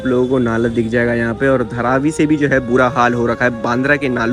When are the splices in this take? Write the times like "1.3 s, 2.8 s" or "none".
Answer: none